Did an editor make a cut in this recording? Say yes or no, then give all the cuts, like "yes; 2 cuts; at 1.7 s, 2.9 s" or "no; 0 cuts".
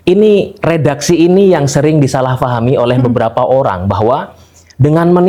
no; 0 cuts